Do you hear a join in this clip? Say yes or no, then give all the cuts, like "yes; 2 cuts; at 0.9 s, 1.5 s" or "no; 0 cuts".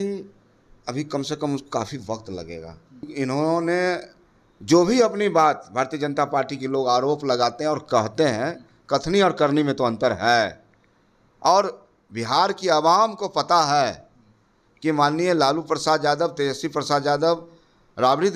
yes; 1 cut; at 3.1 s